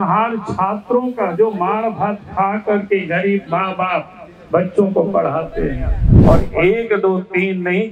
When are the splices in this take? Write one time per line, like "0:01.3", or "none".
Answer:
0:06.1